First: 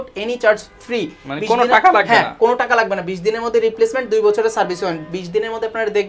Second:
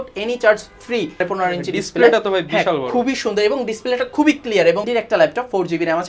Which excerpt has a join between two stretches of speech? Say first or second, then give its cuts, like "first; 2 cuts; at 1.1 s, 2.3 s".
second; 2 cuts; at 1.2 s, 4.8 s